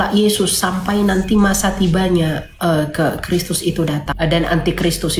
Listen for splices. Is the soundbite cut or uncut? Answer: cut